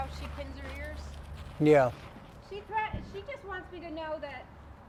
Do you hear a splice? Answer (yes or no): no